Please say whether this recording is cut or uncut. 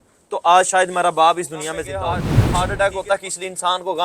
cut